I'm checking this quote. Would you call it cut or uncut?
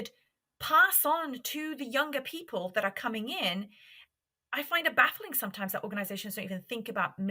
uncut